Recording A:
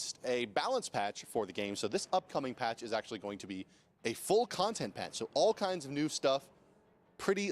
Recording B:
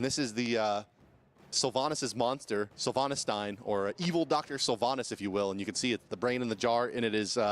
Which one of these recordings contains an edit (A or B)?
A